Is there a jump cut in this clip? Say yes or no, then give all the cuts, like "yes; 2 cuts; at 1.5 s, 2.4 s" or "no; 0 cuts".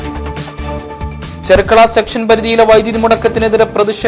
yes; 1 cut; at 1.3 s